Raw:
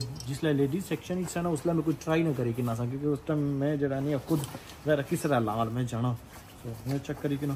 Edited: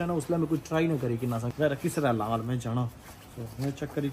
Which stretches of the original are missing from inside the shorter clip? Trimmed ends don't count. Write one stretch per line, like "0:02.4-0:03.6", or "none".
0:02.8-0:04.7